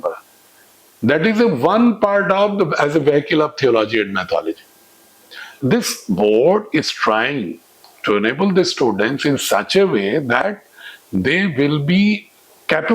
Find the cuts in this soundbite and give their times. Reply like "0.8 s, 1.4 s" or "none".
5.6 s